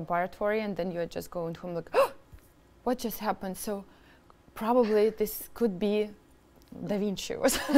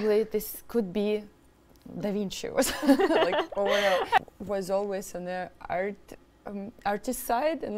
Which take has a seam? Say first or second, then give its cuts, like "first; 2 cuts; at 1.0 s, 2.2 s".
second; 1 cut; at 4.2 s